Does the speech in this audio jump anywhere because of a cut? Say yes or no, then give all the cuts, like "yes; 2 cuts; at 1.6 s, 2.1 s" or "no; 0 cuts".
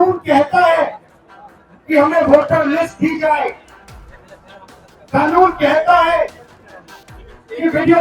no; 0 cuts